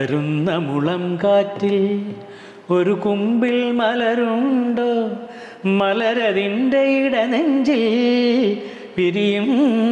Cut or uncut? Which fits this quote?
uncut